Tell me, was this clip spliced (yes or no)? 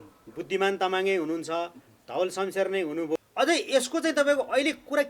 yes